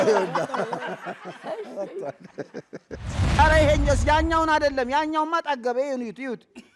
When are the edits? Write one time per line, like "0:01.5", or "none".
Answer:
0:03.2

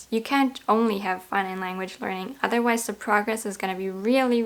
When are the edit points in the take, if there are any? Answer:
none

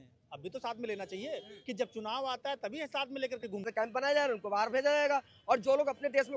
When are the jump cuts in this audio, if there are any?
0:03.6

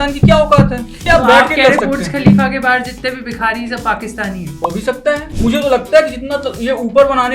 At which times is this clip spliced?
0:01.0
0:05.3

